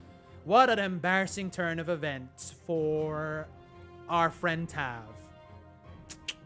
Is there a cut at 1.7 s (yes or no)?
no